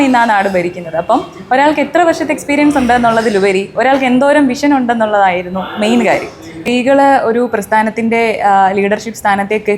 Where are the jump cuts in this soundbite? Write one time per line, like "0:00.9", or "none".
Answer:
0:06.6